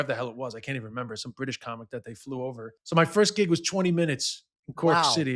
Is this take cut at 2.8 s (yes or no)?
yes